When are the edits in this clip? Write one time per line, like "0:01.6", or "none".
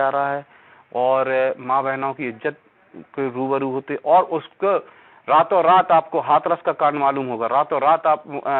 none